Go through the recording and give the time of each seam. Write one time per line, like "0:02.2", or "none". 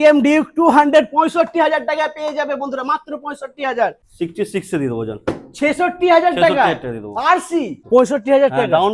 0:04.0
0:07.8